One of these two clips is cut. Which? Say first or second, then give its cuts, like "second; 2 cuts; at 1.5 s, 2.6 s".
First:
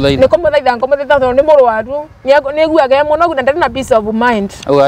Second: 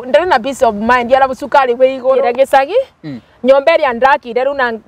second; 1 cut; at 2.2 s